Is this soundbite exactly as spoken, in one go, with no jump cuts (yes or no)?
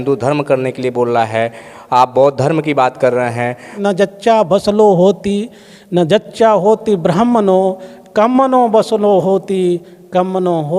no